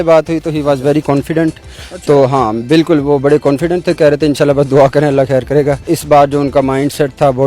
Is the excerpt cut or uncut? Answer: uncut